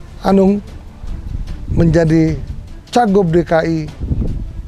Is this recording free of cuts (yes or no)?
yes